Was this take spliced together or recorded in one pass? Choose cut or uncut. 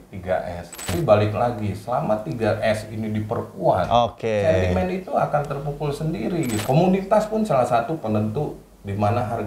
cut